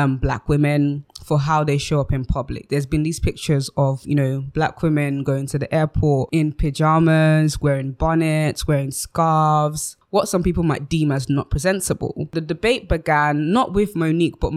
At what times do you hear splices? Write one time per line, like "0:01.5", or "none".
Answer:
none